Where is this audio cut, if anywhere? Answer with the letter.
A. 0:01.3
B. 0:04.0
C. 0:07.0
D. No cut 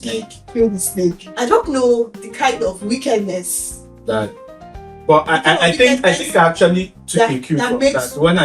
A